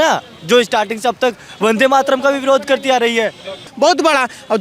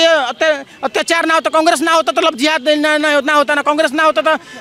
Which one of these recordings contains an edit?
first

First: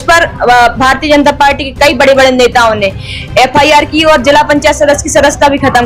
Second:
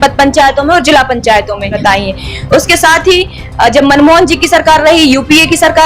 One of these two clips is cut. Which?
second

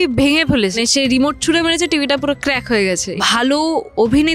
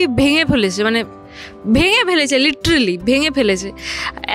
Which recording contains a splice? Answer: first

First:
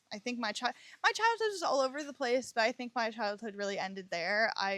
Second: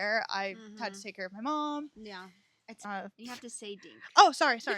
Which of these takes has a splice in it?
second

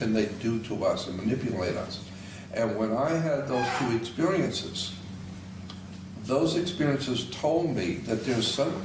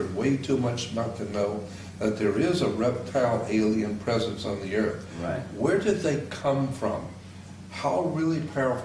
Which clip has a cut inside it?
first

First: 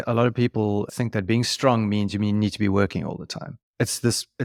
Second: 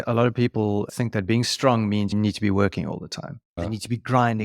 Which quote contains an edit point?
second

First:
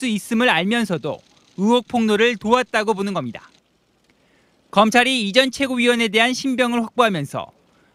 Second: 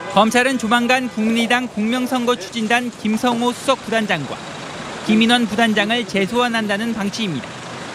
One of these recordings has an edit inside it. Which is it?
first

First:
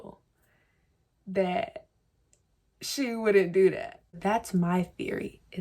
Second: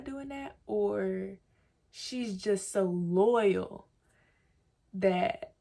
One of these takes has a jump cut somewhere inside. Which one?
first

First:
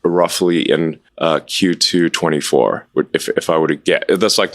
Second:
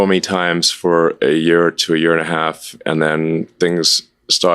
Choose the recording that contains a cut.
first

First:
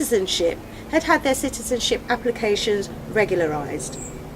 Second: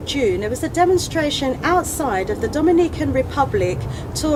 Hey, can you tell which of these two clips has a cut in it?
first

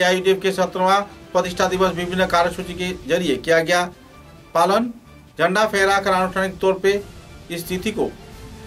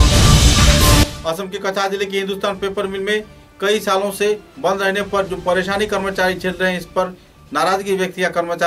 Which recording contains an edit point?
second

